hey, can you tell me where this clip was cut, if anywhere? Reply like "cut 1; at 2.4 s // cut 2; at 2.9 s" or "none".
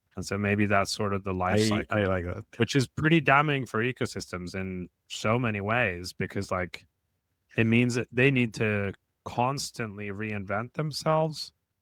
none